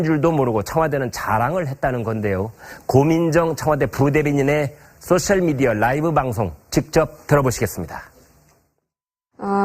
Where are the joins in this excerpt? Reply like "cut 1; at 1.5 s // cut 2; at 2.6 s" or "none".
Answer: cut 1; at 4.8 s